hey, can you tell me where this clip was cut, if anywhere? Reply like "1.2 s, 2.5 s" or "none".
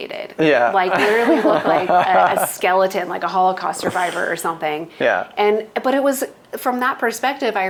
none